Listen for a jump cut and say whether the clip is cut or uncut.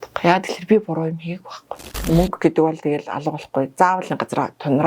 cut